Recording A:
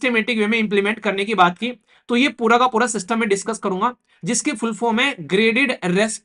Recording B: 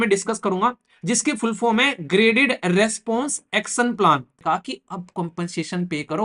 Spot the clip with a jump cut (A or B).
B